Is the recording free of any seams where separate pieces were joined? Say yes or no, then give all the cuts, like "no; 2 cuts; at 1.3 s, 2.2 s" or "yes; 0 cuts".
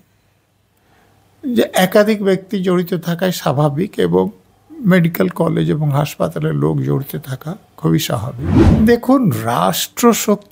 no; 1 cut; at 8.5 s